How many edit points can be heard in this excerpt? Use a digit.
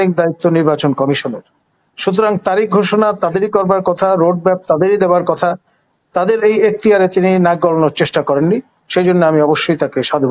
0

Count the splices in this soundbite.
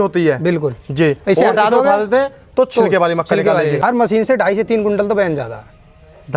1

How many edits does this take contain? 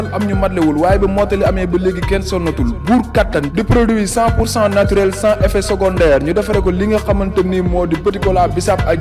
0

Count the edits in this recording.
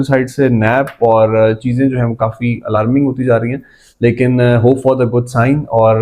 0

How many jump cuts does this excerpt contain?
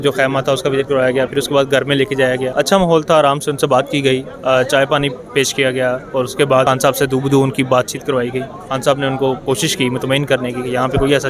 2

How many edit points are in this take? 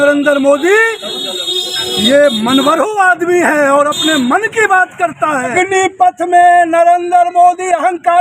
1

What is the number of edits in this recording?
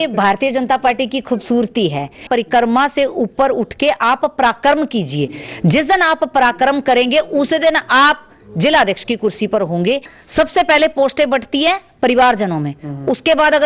2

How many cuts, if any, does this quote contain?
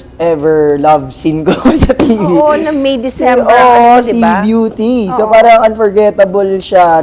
0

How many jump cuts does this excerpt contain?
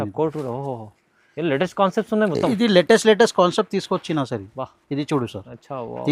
0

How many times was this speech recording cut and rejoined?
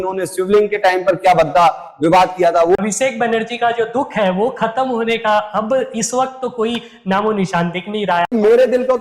2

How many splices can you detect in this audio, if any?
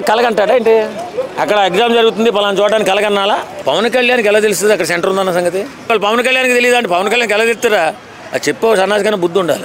2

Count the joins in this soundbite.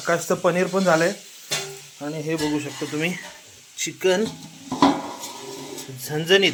0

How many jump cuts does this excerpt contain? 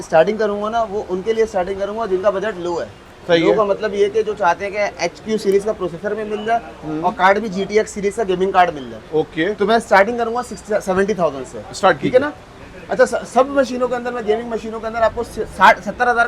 0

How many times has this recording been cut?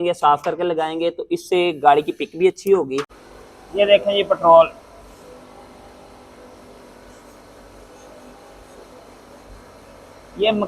1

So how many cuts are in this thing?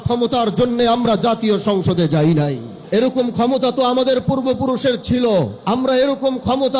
2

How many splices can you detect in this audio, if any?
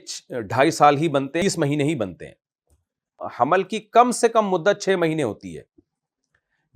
2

